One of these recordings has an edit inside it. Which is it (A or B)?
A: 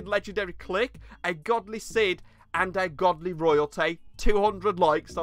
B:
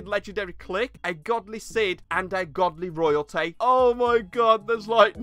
B